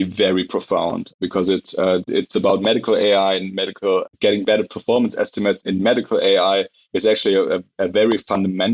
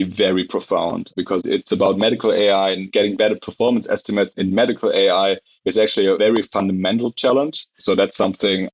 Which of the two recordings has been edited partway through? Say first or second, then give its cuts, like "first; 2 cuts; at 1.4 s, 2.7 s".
second; 4 cuts; at 1.4 s, 2.8 s, 6.2 s, 7.7 s